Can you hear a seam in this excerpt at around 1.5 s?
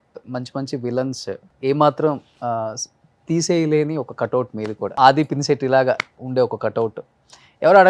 yes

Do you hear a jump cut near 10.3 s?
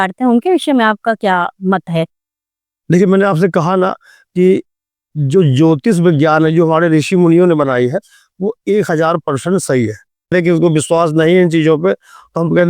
yes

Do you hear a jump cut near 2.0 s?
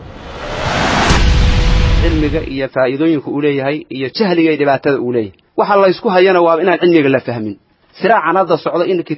yes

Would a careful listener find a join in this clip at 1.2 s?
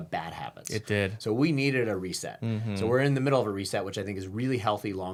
no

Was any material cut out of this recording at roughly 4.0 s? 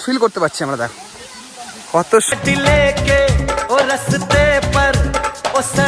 no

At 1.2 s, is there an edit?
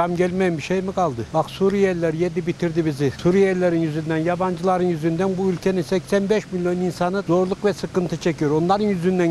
yes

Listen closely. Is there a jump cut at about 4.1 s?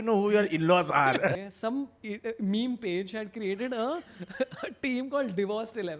no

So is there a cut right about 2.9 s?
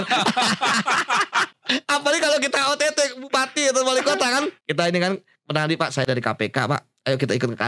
no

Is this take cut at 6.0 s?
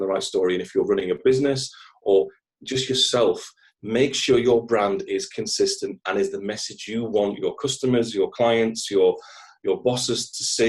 no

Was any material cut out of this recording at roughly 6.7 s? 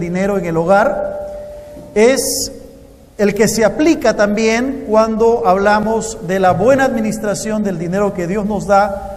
no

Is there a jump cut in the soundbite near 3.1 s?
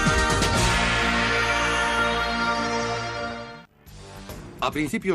yes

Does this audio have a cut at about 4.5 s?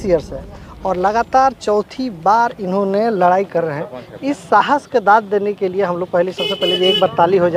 no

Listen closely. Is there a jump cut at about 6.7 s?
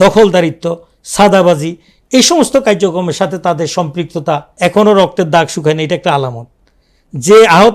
no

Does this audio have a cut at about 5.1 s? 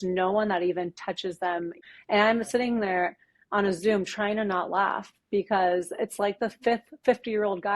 no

